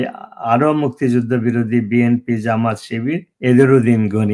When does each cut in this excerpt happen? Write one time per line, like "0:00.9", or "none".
0:03.3